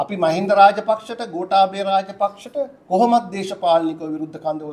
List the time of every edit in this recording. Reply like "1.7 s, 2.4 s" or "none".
none